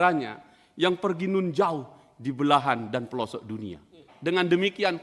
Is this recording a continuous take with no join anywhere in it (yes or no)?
no